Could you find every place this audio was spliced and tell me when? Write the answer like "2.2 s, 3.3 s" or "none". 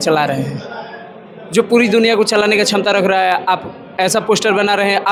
none